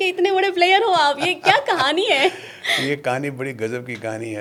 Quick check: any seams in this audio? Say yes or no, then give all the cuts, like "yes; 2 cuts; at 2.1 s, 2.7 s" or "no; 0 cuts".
no; 0 cuts